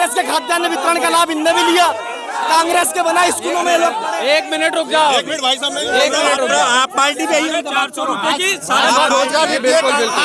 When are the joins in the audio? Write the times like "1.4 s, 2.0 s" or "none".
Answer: none